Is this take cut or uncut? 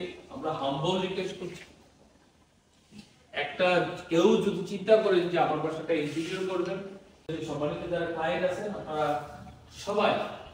cut